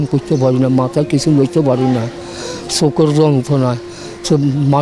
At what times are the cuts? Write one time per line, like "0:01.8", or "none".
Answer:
none